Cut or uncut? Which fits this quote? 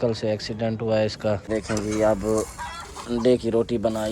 cut